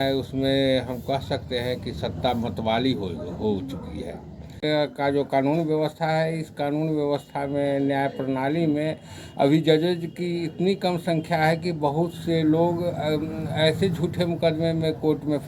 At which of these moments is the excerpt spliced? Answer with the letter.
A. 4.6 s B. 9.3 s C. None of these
A